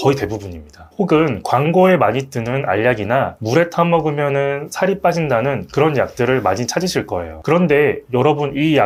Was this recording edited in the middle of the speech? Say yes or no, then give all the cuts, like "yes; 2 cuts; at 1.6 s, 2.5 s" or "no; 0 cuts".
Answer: no; 0 cuts